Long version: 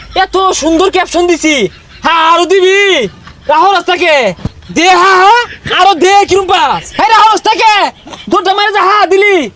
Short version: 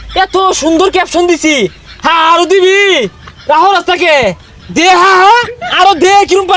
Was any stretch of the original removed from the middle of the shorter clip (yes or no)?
no